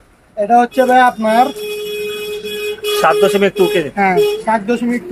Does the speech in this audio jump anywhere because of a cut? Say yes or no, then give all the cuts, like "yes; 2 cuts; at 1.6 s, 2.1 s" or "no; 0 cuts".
no; 0 cuts